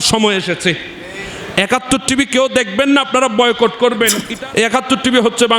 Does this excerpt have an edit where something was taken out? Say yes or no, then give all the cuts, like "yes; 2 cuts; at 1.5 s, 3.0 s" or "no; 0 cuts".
yes; 1 cut; at 4.2 s